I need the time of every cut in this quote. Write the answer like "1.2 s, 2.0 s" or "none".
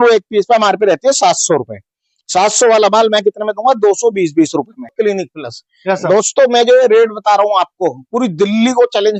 4.9 s